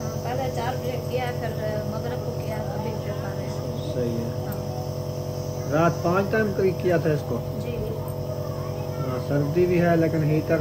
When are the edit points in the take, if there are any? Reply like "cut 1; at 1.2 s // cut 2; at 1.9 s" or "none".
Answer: none